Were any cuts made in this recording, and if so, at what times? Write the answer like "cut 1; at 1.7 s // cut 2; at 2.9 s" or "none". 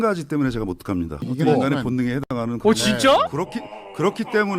cut 1; at 1.3 s